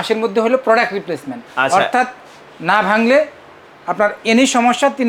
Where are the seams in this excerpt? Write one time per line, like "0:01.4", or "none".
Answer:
none